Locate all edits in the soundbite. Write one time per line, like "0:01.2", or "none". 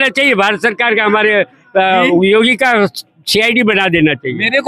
none